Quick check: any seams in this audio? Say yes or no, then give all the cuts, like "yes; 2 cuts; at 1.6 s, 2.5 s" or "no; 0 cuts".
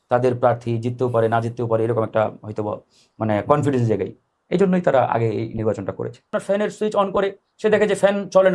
yes; 1 cut; at 6.3 s